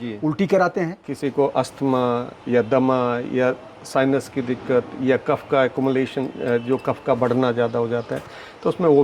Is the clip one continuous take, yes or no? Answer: no